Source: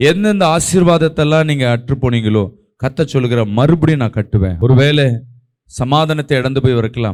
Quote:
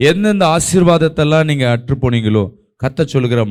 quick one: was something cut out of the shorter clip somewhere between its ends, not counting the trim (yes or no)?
no